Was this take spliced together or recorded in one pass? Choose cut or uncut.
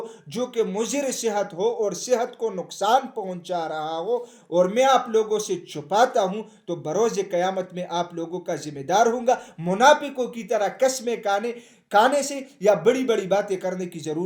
uncut